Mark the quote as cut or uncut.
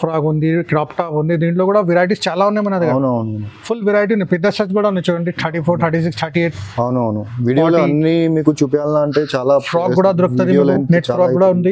uncut